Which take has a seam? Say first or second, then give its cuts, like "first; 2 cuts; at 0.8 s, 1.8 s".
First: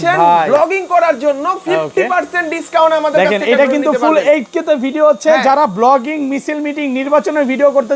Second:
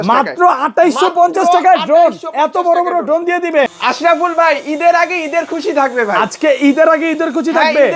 second; 1 cut; at 3.7 s